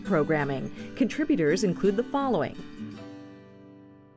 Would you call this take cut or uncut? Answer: cut